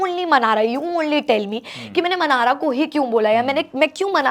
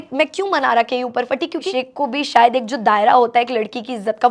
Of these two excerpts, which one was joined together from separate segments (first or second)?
second